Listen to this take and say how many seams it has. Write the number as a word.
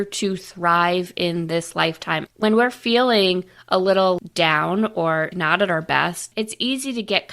four